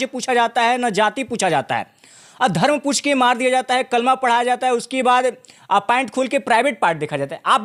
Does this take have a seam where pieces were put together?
no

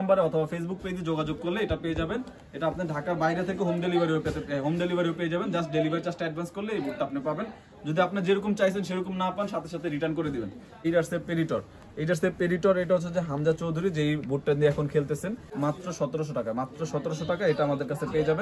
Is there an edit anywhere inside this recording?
yes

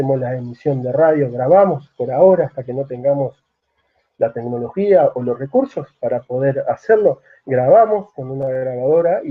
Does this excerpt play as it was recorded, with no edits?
yes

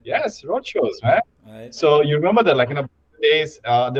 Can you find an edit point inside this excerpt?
no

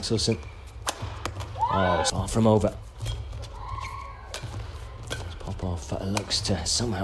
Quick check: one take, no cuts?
no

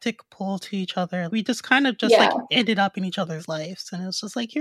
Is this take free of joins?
no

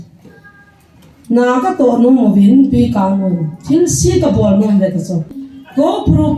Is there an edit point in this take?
yes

